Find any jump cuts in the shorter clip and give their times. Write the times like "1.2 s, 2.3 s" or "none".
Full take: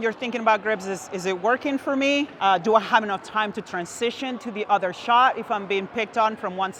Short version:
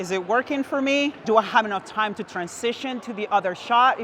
1.2 s